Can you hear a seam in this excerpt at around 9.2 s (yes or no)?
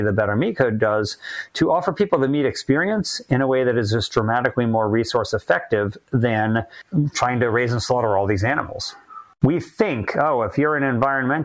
yes